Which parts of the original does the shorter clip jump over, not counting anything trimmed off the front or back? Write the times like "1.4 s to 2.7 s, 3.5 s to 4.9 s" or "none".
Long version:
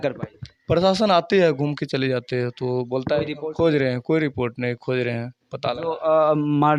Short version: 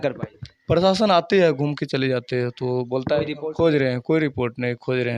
none